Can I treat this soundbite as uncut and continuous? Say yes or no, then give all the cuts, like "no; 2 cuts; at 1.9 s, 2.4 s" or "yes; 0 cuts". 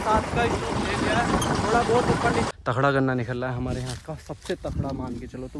no; 1 cut; at 2.5 s